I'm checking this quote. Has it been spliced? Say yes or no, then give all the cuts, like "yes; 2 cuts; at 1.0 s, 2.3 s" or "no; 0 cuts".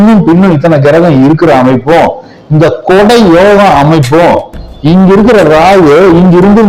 no; 0 cuts